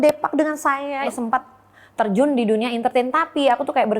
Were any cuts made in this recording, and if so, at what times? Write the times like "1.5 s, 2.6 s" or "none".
1.0 s